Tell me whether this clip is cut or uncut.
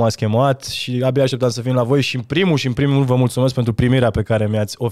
uncut